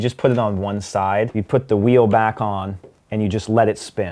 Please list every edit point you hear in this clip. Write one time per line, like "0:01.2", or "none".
0:01.4